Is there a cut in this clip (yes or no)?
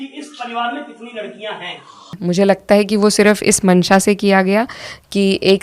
yes